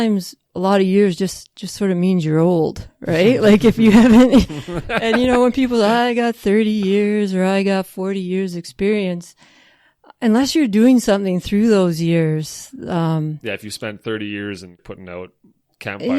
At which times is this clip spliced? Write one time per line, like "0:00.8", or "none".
0:14.8